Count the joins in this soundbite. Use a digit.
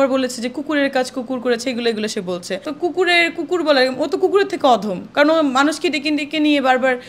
0